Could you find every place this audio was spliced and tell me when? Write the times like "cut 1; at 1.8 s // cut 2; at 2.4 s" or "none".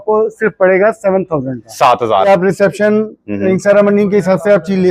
cut 1; at 2.3 s

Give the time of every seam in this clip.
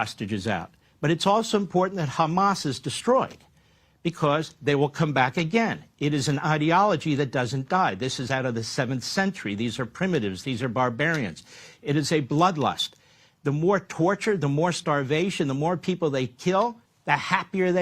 cut 1; at 16.9 s

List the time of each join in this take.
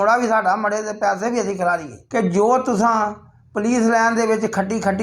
cut 1; at 1.9 s

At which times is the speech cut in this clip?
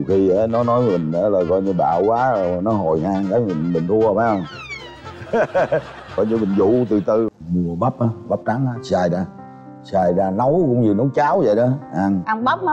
cut 1; at 7.3 s

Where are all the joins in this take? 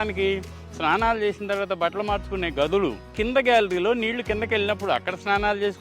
cut 1; at 3.1 s

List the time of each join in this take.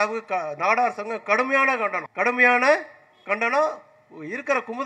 cut 1; at 2.0 s

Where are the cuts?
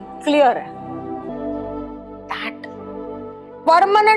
cut 1; at 1.3 s

